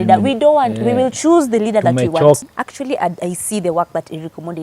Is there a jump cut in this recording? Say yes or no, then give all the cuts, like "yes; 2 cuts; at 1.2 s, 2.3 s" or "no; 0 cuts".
yes; 1 cut; at 2.4 s